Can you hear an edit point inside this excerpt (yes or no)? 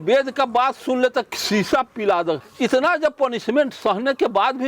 yes